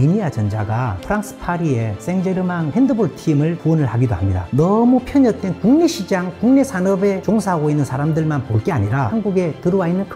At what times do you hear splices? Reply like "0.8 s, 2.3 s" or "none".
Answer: 4.4 s, 9.1 s